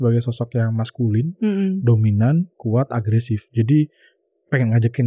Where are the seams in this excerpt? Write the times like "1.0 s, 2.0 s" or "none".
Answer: none